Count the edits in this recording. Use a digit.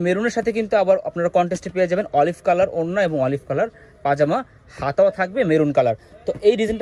0